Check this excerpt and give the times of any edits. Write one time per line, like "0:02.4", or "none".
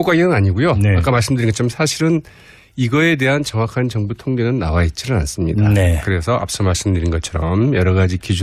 0:06.1